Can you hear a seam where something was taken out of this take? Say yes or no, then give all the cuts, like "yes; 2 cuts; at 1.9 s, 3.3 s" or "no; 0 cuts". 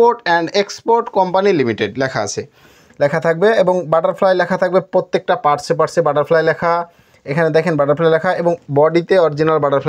no; 0 cuts